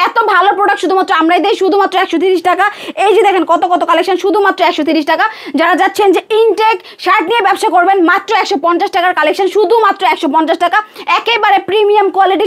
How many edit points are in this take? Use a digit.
0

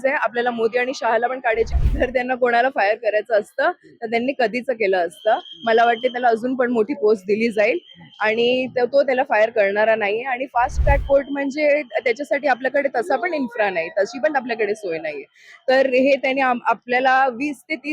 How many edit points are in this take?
1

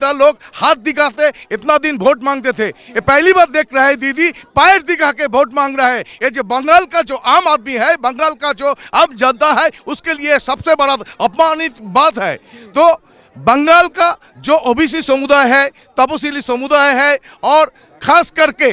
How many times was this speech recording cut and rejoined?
0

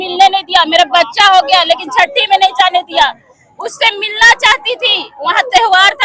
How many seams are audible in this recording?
0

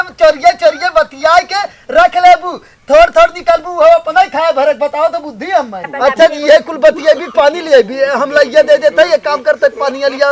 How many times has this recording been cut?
1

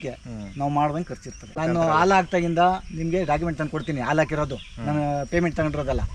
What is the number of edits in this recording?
1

